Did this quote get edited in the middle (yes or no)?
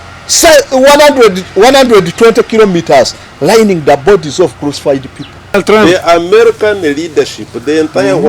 yes